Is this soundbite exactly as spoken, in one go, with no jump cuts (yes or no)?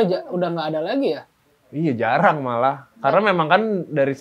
yes